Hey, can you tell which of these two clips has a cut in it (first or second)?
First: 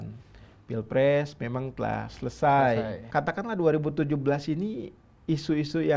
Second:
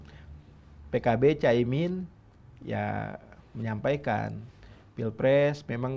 first